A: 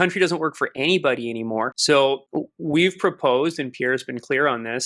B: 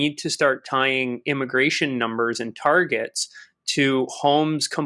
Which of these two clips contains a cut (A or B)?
A